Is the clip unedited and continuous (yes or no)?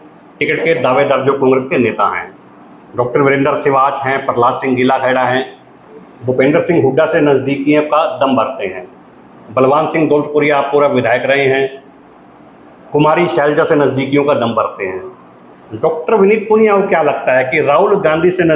yes